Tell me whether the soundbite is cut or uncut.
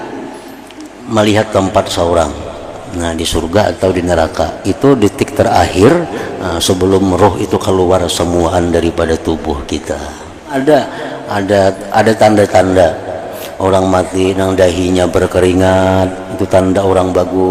cut